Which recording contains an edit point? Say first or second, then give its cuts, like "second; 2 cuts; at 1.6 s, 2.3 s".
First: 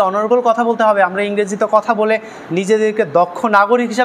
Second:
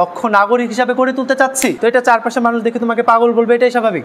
second; 1 cut; at 1.8 s